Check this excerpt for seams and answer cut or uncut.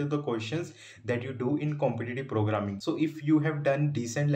cut